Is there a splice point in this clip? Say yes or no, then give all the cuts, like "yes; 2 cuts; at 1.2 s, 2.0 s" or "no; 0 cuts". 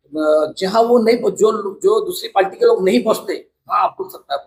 no; 0 cuts